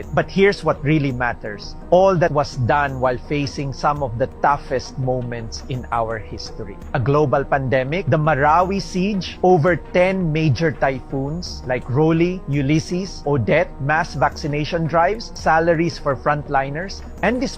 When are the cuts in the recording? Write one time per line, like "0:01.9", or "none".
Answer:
0:06.7
0:09.3

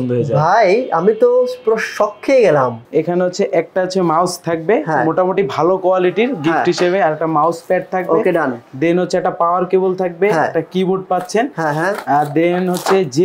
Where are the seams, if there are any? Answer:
0:02.8

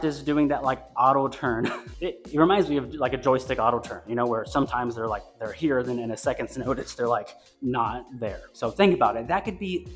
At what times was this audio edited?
0:08.4

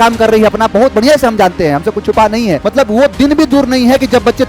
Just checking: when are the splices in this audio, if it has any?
0:02.6

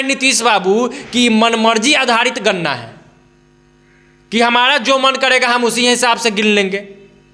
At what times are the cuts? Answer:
none

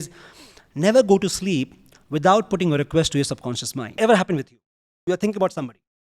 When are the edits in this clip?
0:03.9

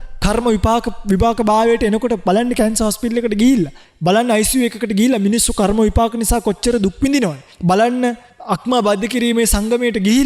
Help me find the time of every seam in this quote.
0:03.8
0:07.5
0:08.3

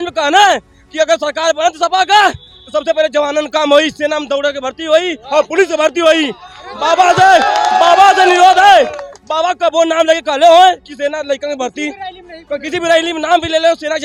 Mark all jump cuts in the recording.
none

